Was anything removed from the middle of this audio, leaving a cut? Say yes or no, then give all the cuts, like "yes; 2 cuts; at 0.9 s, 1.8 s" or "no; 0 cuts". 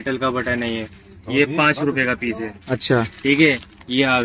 no; 0 cuts